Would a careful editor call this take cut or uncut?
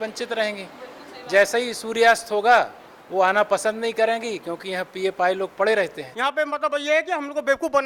cut